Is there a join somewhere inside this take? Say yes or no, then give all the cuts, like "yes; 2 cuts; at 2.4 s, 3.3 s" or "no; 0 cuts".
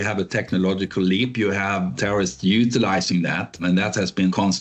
no; 0 cuts